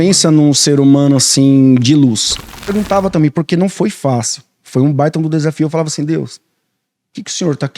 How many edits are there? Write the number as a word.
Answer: one